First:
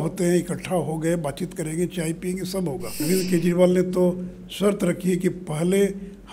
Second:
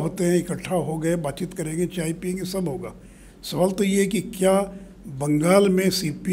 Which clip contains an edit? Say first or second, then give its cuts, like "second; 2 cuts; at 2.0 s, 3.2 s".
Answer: first; 1 cut; at 3.0 s